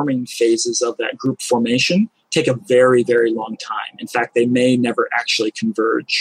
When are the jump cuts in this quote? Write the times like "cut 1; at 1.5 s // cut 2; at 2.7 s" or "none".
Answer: none